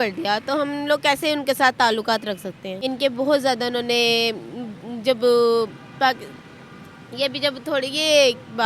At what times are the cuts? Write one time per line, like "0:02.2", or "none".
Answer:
0:02.7